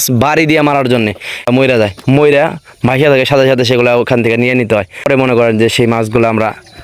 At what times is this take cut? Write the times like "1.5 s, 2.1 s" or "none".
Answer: 1.5 s, 5.1 s